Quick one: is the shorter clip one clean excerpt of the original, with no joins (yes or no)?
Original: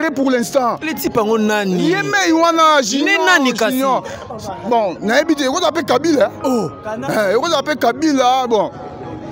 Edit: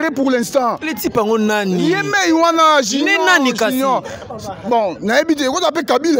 yes